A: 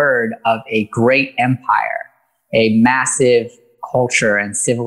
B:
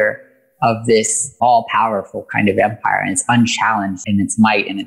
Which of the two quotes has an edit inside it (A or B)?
B